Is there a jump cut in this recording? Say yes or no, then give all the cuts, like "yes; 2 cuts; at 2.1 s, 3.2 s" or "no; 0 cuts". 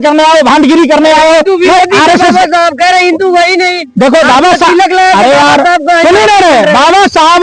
no; 0 cuts